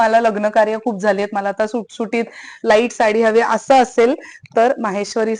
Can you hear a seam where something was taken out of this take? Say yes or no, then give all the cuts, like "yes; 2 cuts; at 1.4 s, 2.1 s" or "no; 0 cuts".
no; 0 cuts